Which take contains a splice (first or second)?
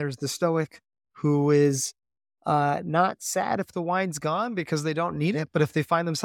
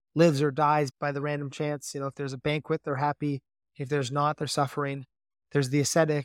second